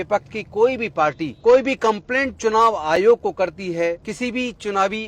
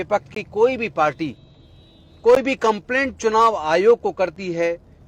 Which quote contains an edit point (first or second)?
first